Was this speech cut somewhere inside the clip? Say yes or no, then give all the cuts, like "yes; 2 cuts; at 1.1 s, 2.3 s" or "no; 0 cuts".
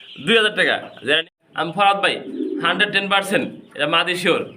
yes; 1 cut; at 1.4 s